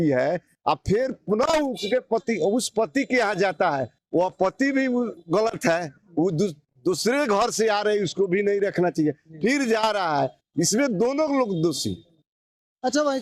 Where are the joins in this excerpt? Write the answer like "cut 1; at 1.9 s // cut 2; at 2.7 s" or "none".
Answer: none

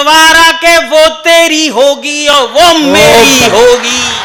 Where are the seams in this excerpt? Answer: none

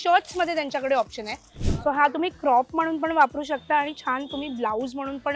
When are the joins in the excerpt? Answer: cut 1; at 1.5 s

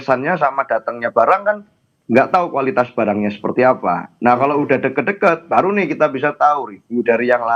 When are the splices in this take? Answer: none

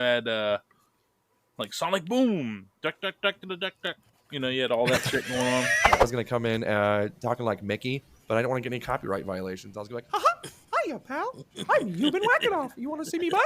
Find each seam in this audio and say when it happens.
cut 1; at 6.0 s

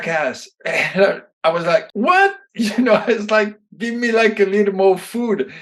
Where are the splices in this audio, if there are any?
cut 1; at 1.9 s

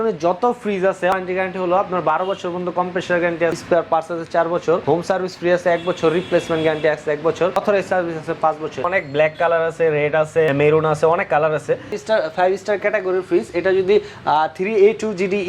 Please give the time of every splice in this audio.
cut 1; at 1.1 s // cut 2; at 3.5 s // cut 3; at 4.8 s // cut 4; at 7.6 s // cut 5; at 8.9 s // cut 6; at 10.5 s // cut 7; at 12.0 s

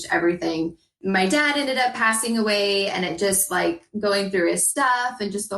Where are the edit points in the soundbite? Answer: cut 1; at 1.0 s

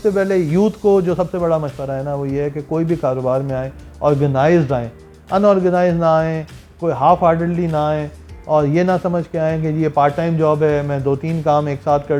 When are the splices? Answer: none

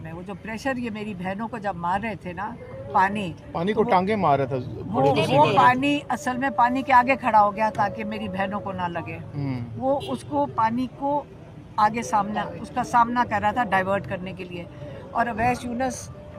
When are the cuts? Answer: none

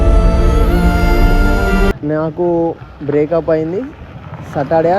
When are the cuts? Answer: cut 1; at 2.0 s

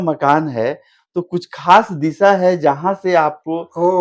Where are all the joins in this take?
none

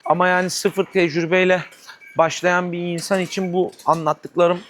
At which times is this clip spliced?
none

